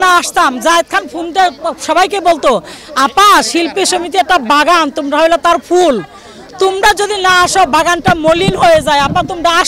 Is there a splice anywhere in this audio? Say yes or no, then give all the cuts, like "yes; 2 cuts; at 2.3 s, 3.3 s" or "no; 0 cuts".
no; 0 cuts